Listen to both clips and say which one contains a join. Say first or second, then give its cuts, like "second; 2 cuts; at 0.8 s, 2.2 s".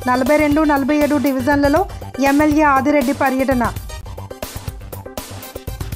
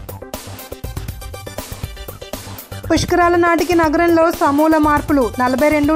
second; 2 cuts; at 0.9 s, 2.9 s